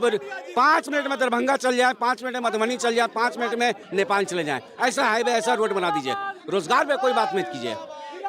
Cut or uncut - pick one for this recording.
uncut